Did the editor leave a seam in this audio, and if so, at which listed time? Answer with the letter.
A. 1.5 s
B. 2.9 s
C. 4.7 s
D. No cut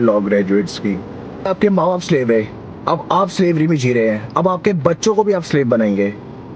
A